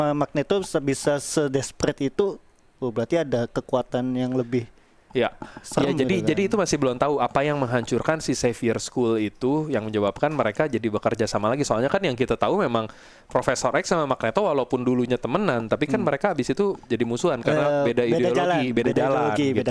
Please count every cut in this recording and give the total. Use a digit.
0